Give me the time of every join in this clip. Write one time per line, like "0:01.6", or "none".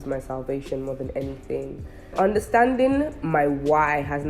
0:02.1